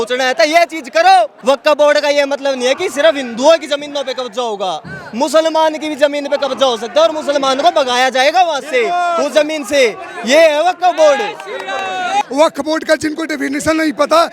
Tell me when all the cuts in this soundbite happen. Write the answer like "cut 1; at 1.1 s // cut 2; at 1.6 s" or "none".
cut 1; at 1.3 s // cut 2; at 12.2 s

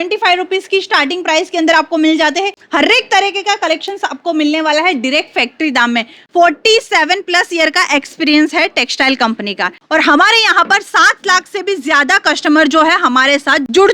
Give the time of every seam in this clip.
cut 1; at 2.6 s // cut 2; at 6.1 s // cut 3; at 9.8 s

